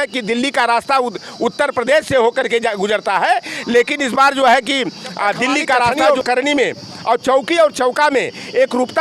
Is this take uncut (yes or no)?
no